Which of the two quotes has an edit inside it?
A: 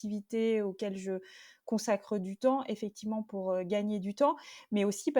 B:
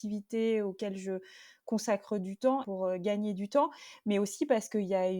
B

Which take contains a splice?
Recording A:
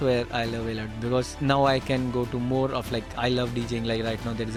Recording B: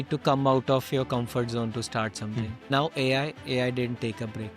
B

